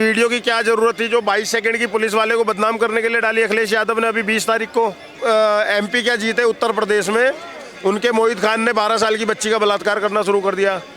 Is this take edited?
yes; 1 cut; at 5.1 s

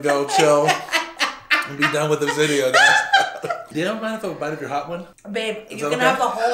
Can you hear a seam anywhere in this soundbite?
yes; 2 cuts; at 3.7 s, 5.0 s

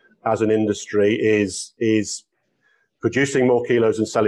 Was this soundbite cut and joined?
no; 0 cuts

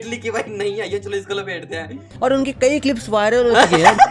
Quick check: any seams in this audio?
yes; 1 cut; at 2.1 s

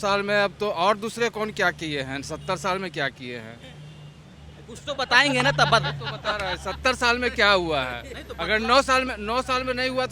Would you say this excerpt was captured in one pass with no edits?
yes; 0 cuts

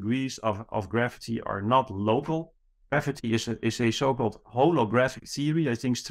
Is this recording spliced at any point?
yes; 1 cut; at 2.8 s

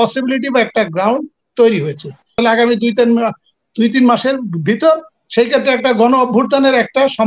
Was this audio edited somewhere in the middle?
yes; 1 cut; at 2.4 s

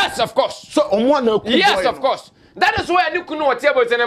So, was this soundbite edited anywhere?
no; 0 cuts

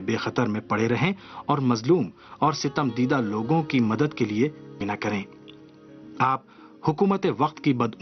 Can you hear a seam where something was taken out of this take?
no; 0 cuts

